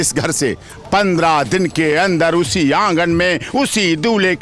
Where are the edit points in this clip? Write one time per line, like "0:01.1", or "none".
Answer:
none